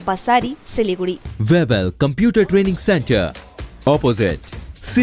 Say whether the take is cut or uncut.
cut